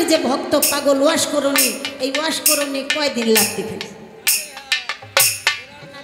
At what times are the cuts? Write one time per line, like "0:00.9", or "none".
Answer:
none